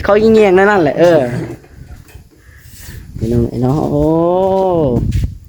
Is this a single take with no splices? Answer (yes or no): yes